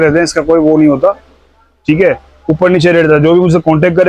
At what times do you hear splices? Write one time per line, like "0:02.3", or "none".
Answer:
none